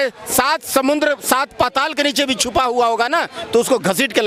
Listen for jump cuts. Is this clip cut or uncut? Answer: uncut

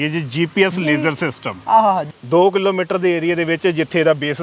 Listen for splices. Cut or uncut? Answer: cut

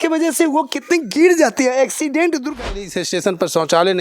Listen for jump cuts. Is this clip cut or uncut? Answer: cut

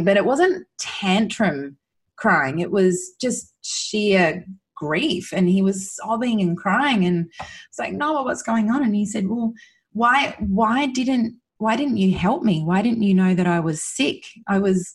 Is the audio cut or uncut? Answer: uncut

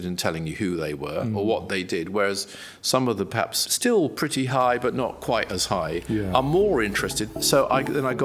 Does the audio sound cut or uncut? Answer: cut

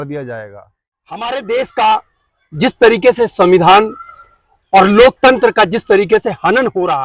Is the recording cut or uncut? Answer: cut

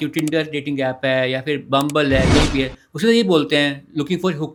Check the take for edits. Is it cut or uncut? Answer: uncut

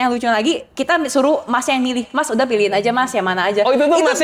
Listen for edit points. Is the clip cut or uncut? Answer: uncut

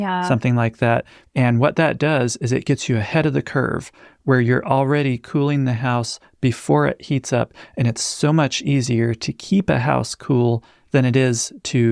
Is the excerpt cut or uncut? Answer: cut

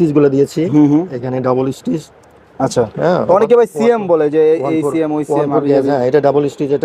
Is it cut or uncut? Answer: uncut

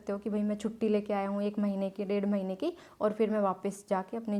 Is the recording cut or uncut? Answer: uncut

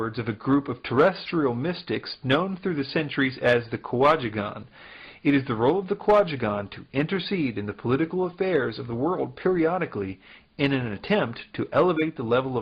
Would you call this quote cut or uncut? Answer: uncut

